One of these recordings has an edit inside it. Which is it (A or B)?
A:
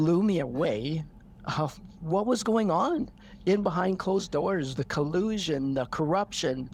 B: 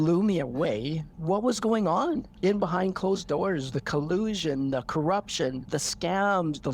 B